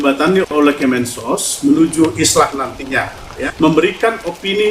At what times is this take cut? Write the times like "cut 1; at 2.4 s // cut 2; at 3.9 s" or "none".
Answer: cut 1; at 3.4 s